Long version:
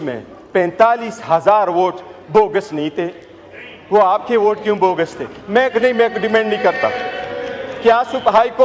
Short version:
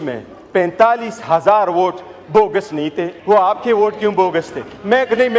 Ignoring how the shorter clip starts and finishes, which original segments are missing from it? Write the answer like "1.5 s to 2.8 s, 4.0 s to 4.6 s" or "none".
3.1 s to 3.8 s

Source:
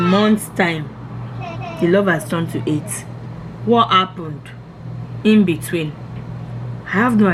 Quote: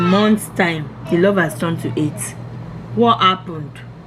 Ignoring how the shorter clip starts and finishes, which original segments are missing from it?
0.9 s to 1.6 s

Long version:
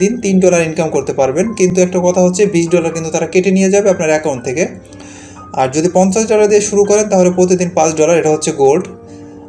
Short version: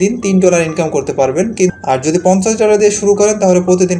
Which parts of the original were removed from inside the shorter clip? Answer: 1.7 s to 5.4 s

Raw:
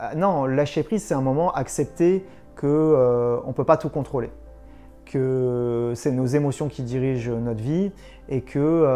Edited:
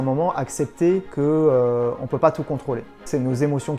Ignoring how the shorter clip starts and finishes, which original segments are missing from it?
2.3 s to 2.5 s, 4.5 s to 6.0 s

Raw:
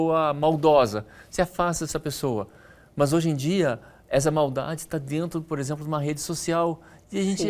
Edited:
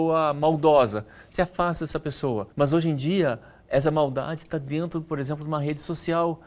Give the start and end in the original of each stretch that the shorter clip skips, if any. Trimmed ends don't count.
2.5 s to 2.9 s

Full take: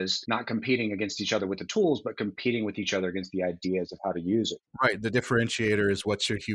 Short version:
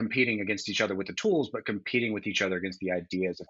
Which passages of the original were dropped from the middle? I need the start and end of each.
none

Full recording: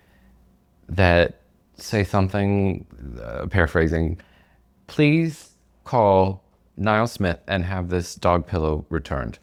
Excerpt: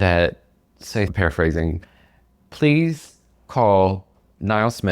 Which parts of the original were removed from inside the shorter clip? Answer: 2.1 s to 3.5 s

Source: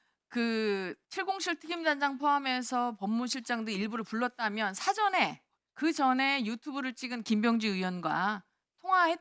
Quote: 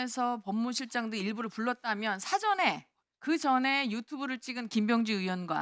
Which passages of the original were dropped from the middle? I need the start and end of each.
none

